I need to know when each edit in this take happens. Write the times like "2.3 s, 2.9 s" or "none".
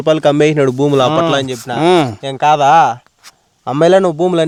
none